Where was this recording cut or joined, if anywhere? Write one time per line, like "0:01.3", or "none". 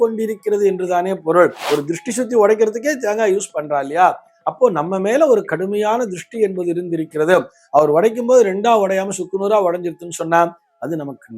0:01.6